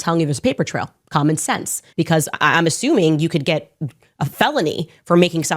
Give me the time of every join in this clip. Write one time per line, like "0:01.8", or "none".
0:01.8